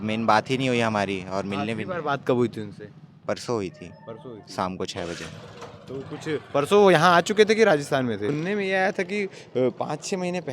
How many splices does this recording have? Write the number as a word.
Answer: one